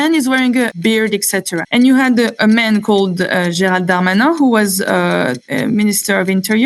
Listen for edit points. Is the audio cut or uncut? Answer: cut